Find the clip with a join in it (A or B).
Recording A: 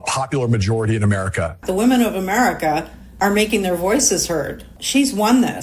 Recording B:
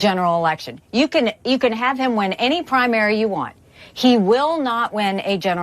A